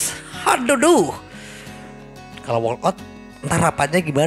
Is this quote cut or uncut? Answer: uncut